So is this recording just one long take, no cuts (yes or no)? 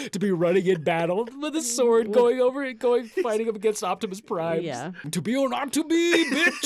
no